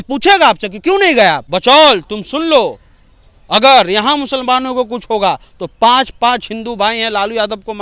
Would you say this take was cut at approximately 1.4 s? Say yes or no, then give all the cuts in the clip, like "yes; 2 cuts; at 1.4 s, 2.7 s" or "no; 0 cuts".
yes; 1 cut; at 1.4 s